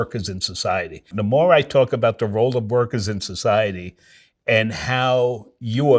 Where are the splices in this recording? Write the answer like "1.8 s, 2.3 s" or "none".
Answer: 1.1 s